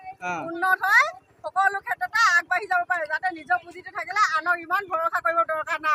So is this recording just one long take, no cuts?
yes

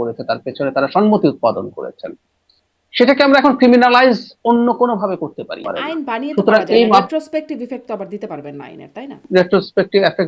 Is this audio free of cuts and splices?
no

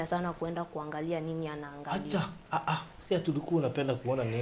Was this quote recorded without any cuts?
yes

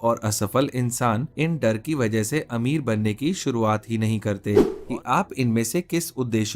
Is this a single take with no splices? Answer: no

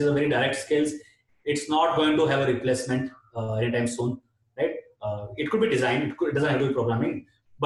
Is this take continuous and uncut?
yes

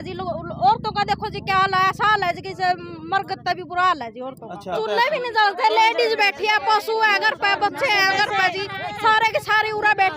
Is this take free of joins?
no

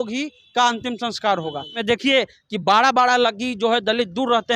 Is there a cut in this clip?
yes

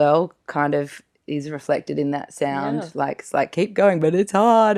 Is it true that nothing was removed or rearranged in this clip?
yes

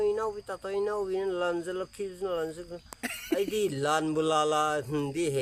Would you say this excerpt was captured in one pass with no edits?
yes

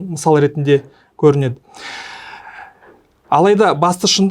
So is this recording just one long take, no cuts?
yes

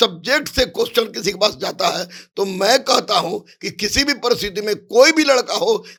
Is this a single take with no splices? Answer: yes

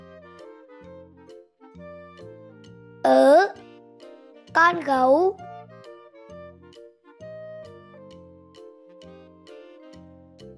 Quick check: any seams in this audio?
yes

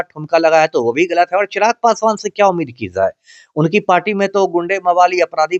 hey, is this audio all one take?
yes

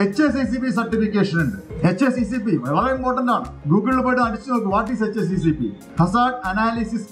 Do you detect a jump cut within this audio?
yes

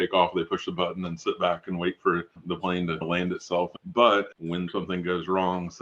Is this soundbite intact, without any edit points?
no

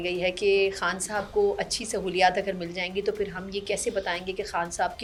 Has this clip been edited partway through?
no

